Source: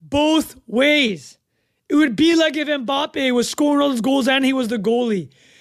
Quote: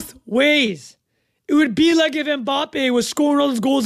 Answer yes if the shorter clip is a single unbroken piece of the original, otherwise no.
yes